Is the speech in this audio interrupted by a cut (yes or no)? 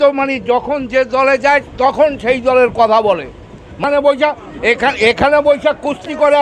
yes